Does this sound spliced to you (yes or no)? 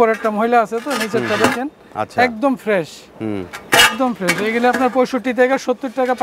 no